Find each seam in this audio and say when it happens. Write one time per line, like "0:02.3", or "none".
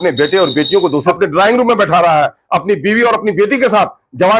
0:01.1